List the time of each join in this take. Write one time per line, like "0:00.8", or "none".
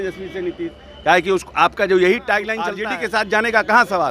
0:02.8